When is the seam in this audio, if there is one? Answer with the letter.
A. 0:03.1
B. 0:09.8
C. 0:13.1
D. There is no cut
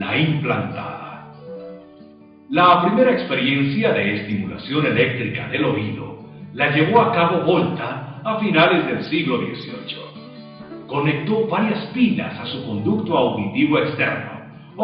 D